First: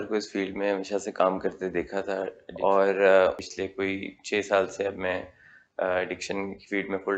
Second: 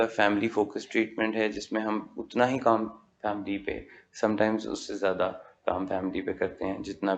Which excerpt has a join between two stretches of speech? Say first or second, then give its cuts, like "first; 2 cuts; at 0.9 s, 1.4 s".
first; 2 cuts; at 2.4 s, 3.5 s